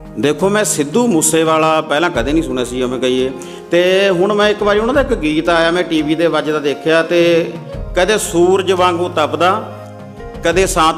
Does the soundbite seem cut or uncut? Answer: uncut